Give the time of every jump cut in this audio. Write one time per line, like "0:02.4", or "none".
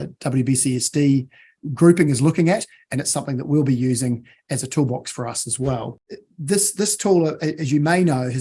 0:05.9